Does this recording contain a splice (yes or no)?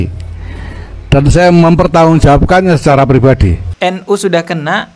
yes